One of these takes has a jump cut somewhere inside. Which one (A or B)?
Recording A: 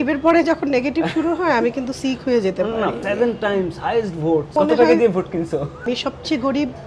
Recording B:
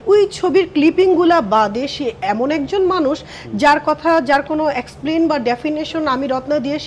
A